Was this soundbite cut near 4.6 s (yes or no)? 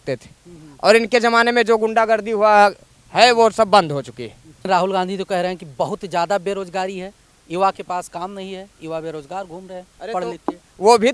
yes